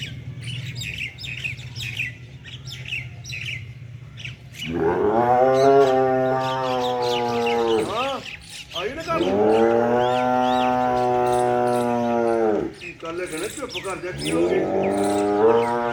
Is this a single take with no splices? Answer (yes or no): yes